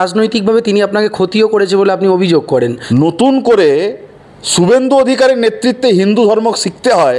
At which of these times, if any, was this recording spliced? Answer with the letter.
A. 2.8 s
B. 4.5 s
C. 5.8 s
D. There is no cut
A